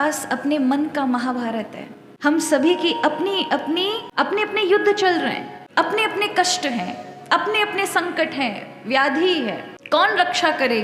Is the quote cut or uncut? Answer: uncut